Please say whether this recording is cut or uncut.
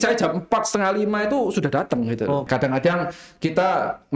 cut